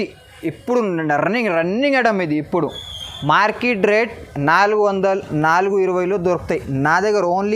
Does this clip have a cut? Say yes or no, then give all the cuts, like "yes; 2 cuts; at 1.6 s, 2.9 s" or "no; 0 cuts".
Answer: no; 0 cuts